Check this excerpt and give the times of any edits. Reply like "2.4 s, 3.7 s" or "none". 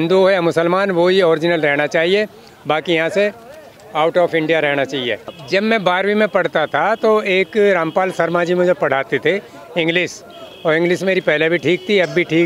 none